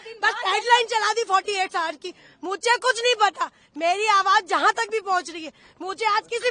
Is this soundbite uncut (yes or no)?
yes